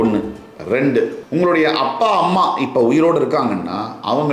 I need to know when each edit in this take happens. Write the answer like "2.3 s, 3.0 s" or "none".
1.2 s

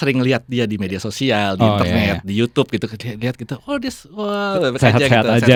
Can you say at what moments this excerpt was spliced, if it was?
none

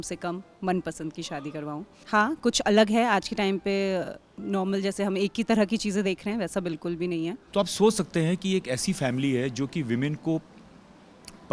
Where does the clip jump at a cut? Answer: 1.9 s, 7.4 s

